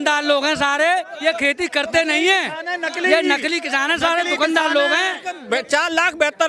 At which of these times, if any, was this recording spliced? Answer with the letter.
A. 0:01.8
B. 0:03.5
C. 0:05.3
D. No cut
C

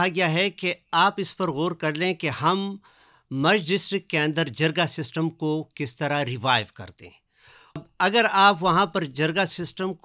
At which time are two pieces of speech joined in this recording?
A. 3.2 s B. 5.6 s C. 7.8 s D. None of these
C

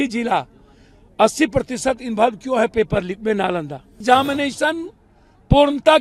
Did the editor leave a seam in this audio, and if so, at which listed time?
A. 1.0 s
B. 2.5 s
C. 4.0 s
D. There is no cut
C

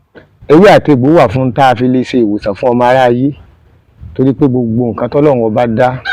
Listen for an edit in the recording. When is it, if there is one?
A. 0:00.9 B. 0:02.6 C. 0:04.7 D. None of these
D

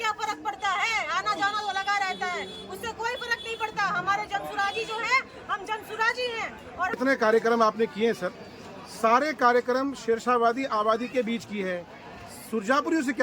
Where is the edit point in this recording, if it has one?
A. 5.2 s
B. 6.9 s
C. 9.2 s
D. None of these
B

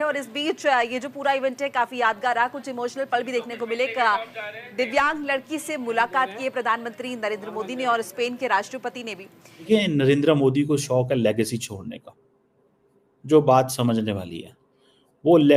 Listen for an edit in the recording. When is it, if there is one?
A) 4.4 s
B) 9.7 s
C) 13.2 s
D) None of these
B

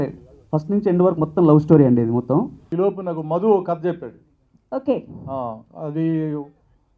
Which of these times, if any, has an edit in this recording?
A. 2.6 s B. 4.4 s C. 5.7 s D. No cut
A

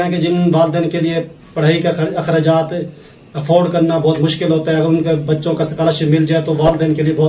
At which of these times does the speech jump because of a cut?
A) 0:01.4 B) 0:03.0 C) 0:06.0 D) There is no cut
D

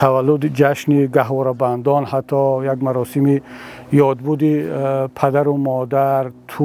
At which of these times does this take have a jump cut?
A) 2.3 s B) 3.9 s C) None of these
C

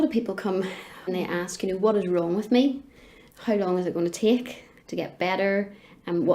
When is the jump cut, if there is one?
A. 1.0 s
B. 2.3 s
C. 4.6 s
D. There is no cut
A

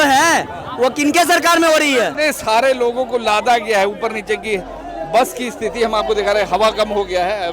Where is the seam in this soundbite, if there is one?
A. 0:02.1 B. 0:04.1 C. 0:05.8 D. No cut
A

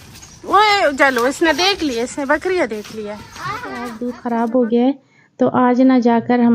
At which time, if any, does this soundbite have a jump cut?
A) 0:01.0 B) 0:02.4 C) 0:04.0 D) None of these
C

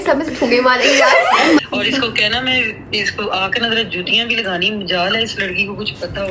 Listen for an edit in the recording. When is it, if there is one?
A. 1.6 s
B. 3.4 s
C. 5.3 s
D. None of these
A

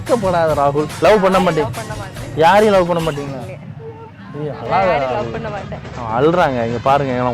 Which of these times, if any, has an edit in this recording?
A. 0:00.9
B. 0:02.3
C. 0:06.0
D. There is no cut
A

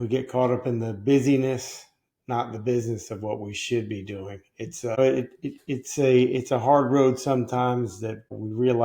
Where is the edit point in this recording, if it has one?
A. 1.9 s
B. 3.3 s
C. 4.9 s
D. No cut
D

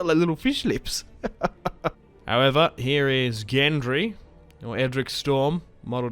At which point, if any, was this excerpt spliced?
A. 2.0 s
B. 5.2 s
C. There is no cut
A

